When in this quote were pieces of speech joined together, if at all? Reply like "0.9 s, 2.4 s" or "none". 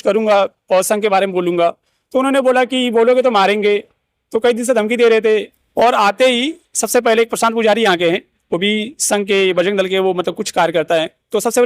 5.6 s